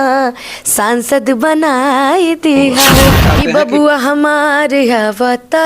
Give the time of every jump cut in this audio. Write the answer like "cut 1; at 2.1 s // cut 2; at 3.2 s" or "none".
cut 1; at 3.3 s